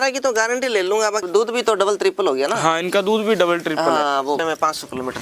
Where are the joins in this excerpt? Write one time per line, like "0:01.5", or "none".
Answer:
0:01.2
0:04.4